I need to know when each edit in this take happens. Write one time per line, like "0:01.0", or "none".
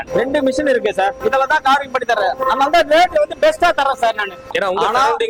0:01.2
0:04.5